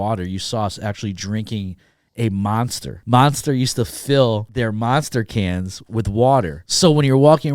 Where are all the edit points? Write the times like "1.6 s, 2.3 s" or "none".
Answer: 2.9 s, 4.5 s, 6.6 s